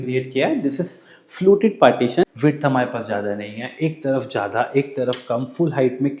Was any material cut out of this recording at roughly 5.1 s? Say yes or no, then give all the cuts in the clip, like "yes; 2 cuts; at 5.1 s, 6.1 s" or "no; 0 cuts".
no; 1 cut; at 2.2 s